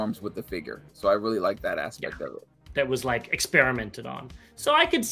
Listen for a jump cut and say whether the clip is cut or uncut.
cut